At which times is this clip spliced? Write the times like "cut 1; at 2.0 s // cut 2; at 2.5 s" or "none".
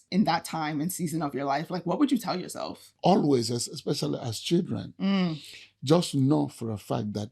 cut 1; at 2.9 s